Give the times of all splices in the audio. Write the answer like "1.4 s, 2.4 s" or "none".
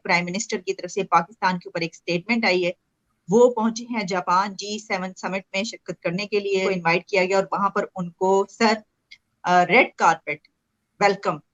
none